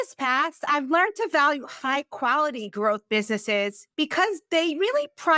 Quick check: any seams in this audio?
yes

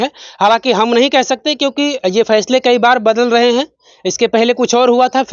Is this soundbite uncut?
yes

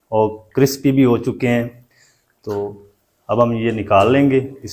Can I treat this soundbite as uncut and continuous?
yes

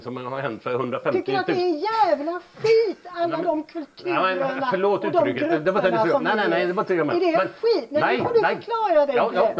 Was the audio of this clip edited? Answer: no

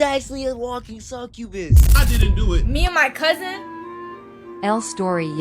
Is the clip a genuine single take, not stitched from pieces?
no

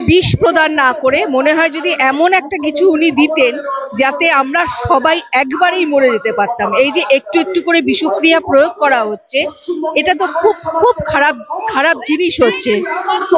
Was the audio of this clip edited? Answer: no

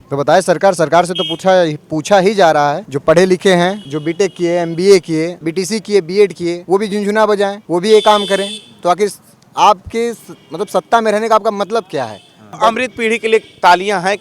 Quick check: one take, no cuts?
no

